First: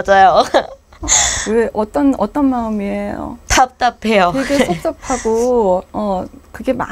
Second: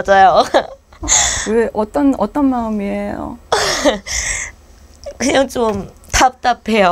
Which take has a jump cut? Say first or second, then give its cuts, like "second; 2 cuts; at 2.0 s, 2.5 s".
first; 1 cut; at 3.3 s